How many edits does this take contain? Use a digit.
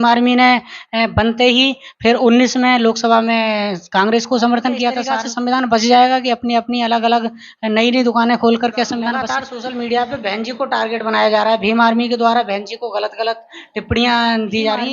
2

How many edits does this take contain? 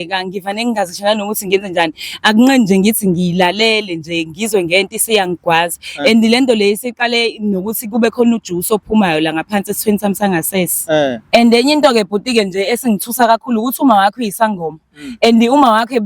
1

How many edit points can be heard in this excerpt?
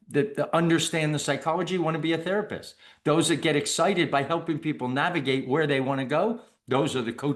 0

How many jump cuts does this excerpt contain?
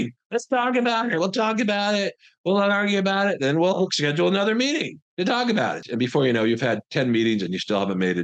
1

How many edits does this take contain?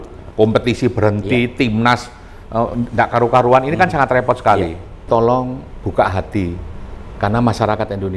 1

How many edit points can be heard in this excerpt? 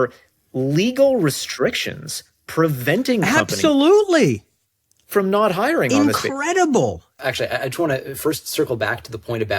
1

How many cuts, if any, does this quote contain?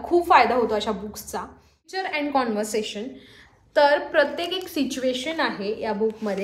1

